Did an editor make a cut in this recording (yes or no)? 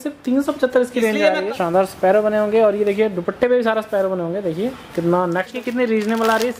yes